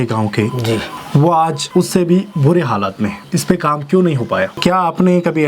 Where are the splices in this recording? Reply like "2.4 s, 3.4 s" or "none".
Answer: 0.9 s, 1.6 s, 3.2 s, 4.5 s